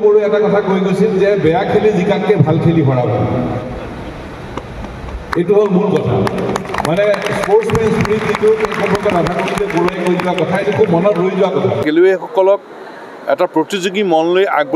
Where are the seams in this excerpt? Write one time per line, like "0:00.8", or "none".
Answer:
0:11.8